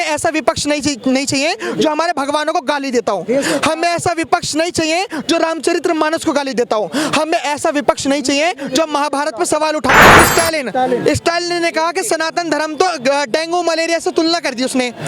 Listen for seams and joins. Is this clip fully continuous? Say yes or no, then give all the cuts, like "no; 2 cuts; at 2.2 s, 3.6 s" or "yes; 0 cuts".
no; 1 cut; at 10.1 s